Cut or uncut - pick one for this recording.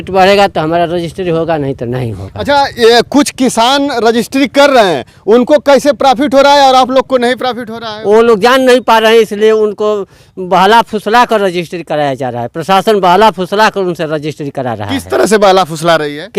uncut